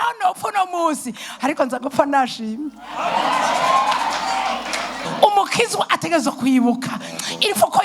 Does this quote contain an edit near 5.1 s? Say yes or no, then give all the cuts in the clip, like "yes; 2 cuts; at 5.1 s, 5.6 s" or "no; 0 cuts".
yes; 1 cut; at 5.1 s